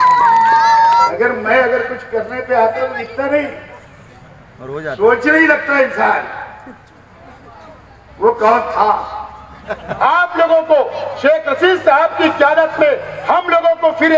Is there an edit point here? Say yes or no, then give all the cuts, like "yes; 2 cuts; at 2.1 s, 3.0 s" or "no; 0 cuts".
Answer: yes; 2 cuts; at 1.1 s, 9.8 s